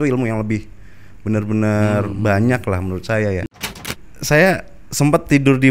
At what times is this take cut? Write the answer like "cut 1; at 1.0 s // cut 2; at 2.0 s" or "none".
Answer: cut 1; at 3.8 s